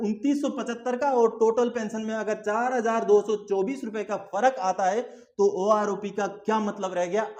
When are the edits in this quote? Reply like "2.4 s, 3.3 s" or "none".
none